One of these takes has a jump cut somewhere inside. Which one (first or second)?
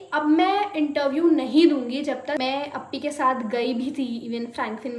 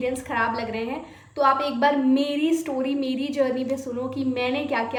first